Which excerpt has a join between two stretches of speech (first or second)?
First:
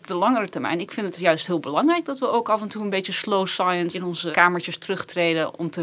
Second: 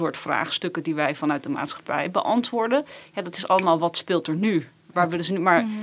first